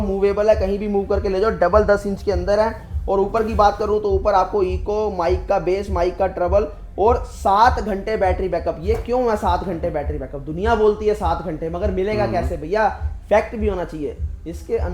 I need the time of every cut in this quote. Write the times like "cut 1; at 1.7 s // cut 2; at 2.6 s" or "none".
none

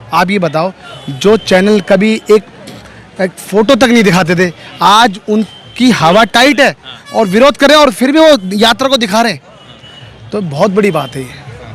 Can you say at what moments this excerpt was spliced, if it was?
none

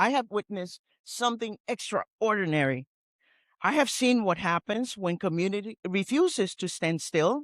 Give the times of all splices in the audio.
cut 1; at 5.8 s

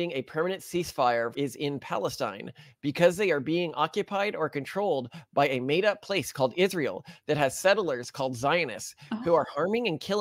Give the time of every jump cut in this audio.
none

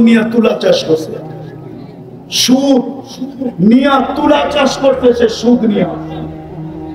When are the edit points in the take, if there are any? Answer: cut 1; at 5.9 s

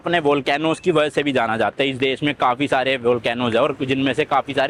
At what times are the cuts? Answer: none

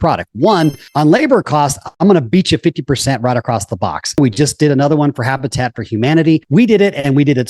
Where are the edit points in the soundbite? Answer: cut 1; at 0.8 s // cut 2; at 4.2 s // cut 3; at 6.4 s

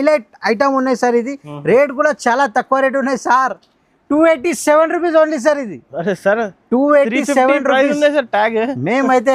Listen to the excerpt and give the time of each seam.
none

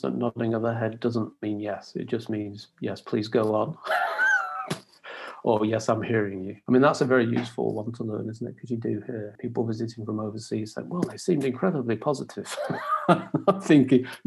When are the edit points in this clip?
cut 1; at 6.5 s // cut 2; at 9.3 s

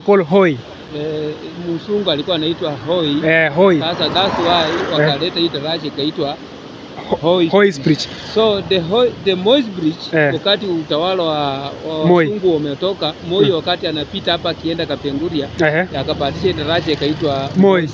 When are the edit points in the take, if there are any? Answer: none

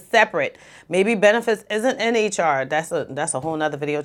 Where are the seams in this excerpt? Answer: none

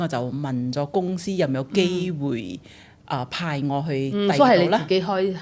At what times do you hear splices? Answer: none

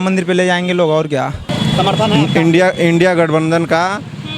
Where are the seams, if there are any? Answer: cut 1; at 1.8 s

